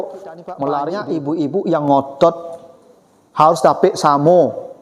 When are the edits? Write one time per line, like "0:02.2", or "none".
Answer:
0:01.0